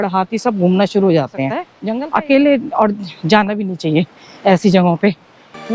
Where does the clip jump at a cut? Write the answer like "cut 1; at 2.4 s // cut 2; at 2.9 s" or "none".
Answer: cut 1; at 1.7 s